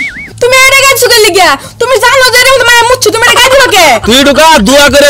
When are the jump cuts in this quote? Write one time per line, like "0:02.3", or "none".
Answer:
0:04.0